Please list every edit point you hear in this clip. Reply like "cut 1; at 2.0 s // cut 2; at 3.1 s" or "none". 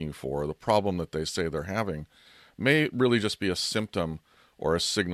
none